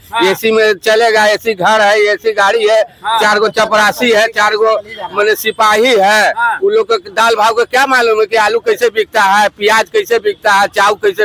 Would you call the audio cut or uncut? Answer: uncut